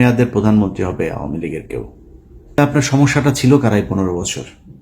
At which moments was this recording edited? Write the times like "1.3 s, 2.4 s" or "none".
2.6 s